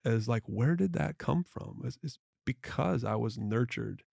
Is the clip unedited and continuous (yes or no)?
yes